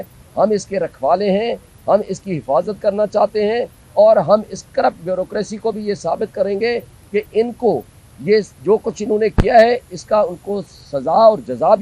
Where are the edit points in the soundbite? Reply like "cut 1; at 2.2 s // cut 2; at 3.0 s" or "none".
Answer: none